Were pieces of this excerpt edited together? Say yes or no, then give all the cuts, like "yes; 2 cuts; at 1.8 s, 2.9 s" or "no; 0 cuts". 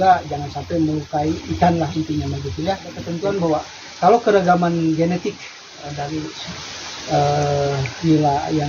yes; 1 cut; at 3.1 s